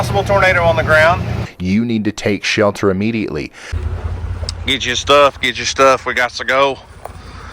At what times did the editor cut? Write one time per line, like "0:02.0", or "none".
0:01.5
0:03.8